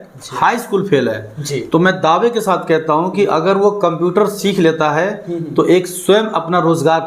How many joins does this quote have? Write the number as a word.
zero